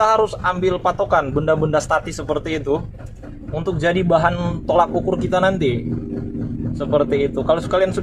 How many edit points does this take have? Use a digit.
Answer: 0